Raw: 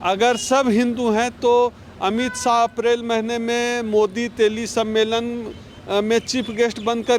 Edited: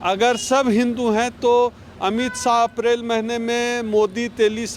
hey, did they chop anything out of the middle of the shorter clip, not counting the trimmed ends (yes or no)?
no